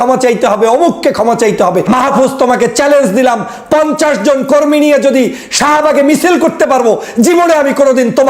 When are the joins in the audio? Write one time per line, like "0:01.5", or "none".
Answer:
0:01.8